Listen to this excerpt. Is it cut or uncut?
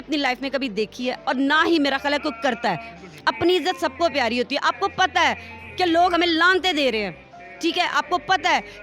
uncut